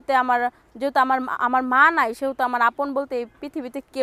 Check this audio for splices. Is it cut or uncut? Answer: uncut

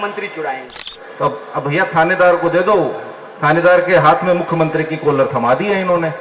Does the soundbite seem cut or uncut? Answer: cut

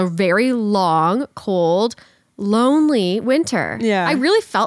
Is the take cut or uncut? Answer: uncut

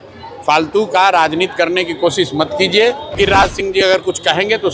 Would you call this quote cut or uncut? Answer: cut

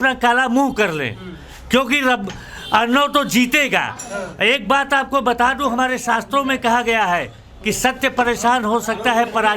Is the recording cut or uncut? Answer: uncut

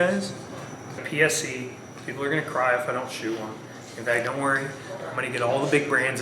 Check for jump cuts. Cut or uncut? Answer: cut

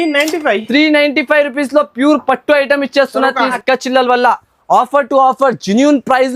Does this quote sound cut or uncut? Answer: cut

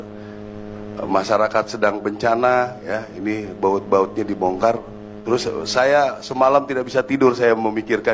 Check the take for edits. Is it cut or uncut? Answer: cut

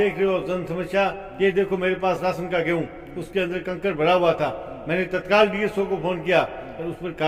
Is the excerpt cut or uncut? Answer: uncut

